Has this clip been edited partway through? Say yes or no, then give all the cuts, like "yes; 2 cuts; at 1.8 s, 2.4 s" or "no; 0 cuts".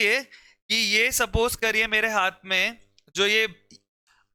no; 0 cuts